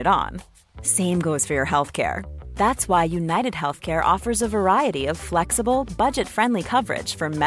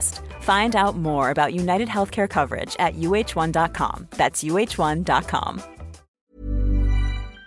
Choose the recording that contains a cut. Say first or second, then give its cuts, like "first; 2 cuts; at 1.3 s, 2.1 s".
second; 1 cut; at 6.2 s